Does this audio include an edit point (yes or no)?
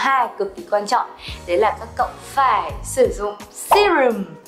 no